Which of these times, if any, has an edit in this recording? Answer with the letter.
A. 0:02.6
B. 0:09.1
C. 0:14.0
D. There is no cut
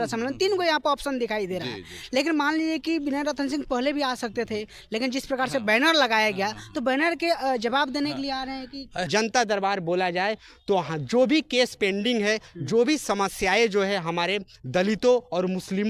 B